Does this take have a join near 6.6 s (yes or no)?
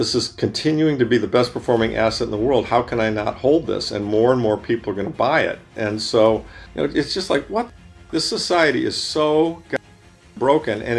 yes